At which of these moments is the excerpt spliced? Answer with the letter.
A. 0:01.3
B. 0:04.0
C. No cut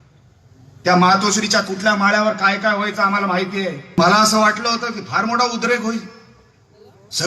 B